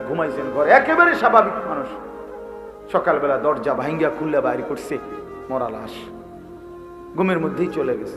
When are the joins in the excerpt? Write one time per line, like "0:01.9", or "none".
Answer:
0:05.9
0:07.2